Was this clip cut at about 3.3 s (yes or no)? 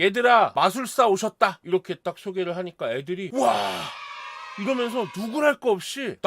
yes